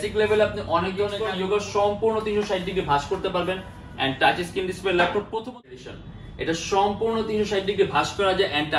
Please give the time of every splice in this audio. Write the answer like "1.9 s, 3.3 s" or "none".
1.2 s, 5.8 s